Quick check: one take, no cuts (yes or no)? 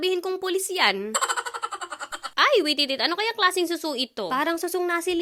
yes